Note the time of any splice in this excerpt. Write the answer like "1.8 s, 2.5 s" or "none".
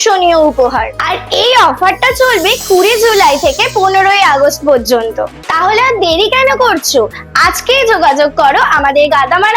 none